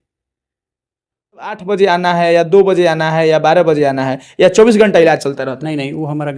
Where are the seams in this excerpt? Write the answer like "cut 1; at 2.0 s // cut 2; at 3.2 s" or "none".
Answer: cut 1; at 1.6 s

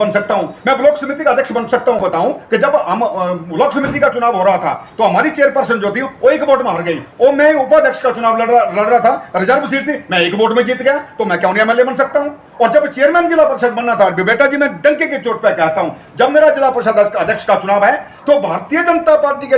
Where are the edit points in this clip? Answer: cut 1; at 2.1 s

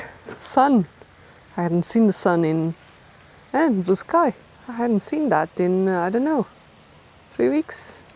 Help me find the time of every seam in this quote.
none

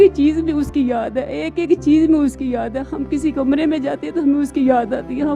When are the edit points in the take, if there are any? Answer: none

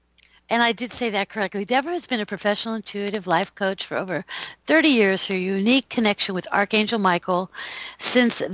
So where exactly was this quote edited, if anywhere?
none

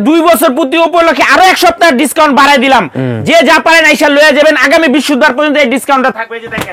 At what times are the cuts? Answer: none

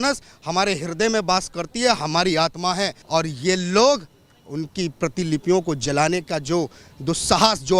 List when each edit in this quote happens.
cut 1; at 3.0 s

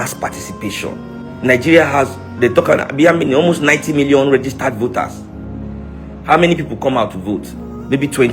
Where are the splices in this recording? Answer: cut 1; at 1.3 s // cut 2; at 7.5 s

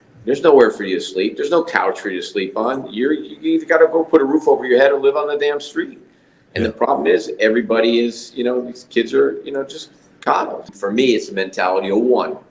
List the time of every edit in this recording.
cut 1; at 10.7 s

